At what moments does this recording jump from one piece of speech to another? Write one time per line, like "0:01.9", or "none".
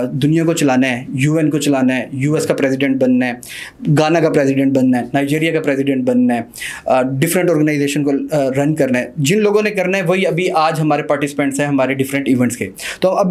none